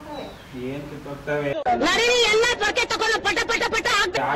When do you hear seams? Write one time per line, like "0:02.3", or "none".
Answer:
none